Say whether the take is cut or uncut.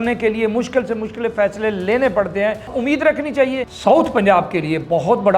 cut